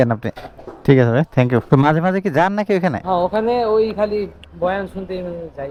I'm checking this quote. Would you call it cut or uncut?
uncut